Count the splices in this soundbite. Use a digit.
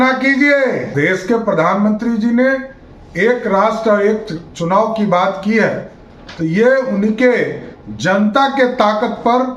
1